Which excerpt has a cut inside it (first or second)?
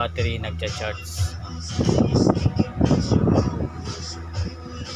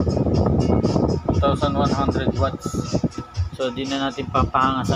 first